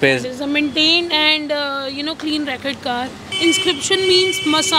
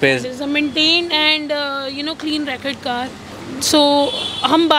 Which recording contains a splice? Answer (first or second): first